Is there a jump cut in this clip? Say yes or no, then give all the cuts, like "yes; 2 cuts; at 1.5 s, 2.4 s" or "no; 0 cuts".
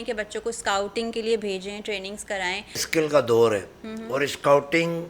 yes; 1 cut; at 2.9 s